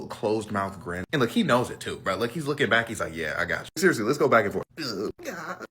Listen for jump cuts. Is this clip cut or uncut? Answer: uncut